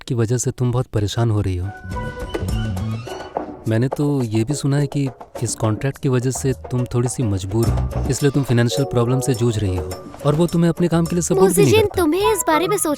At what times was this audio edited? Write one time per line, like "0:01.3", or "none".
0:01.9

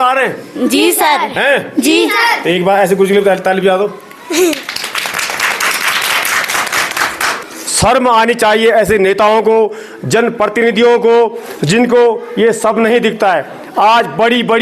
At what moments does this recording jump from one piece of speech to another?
0:07.4

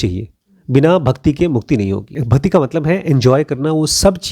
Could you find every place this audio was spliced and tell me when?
0:02.1

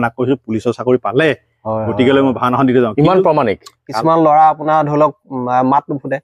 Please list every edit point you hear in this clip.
0:03.9

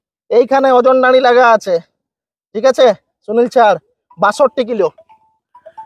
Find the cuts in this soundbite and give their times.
none

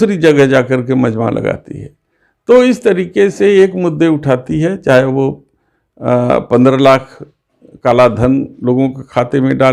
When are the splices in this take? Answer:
none

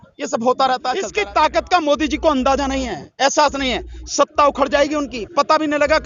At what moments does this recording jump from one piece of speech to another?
0:01.1

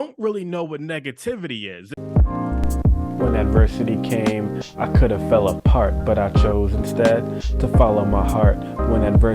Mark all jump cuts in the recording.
0:01.8

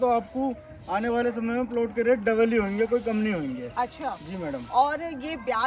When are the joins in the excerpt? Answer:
none

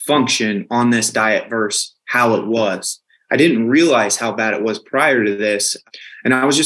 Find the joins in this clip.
none

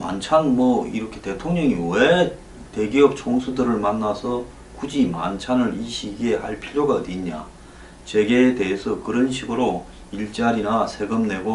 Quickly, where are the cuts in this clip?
0:05.0

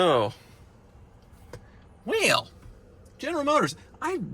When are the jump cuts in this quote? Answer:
none

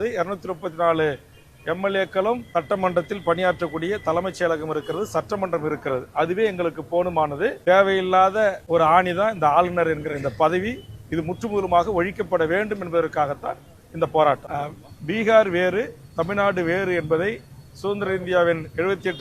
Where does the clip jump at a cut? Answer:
0:02.4
0:07.6
0:08.6
0:14.4

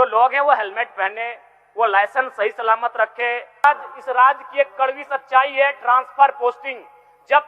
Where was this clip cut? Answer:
0:03.6

